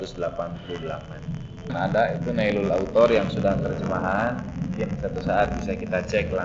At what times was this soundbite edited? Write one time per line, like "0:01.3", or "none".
0:01.7